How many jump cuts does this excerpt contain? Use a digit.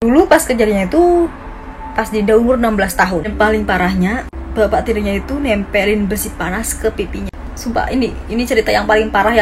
1